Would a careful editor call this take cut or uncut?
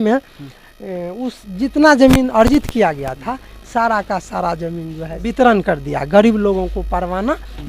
cut